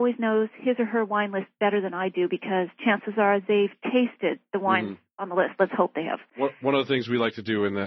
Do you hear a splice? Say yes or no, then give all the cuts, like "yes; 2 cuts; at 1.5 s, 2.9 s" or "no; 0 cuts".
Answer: no; 0 cuts